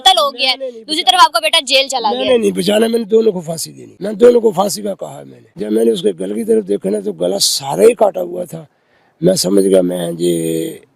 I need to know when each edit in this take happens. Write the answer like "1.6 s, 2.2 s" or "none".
4.1 s, 5.7 s